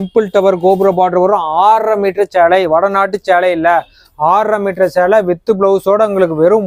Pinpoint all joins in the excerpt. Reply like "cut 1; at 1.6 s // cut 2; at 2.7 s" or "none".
none